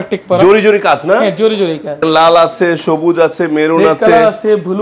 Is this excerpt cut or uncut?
cut